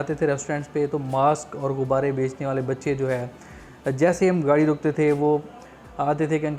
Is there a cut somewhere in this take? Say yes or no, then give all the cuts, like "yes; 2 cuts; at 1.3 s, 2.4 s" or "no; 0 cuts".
no; 0 cuts